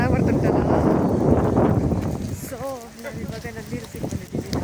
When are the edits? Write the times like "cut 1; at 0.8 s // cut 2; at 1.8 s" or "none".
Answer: none